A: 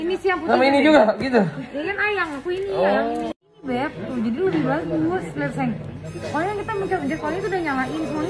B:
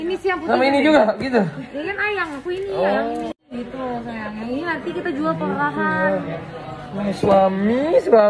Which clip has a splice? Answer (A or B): A